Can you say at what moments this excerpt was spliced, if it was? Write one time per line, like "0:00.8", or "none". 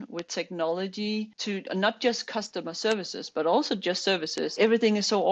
0:01.4
0:04.5